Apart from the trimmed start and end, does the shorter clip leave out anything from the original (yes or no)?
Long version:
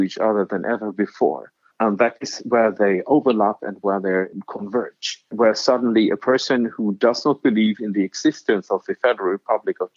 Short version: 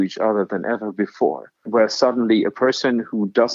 yes